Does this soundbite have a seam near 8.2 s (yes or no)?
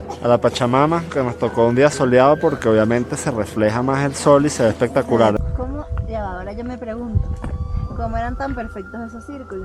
no